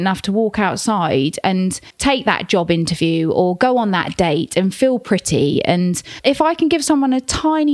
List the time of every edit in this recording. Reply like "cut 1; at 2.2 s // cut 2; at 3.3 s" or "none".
cut 1; at 1.9 s // cut 2; at 6.1 s